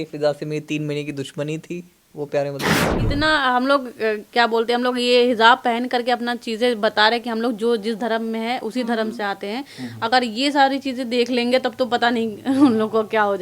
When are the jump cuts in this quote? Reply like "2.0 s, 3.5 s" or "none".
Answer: 3.0 s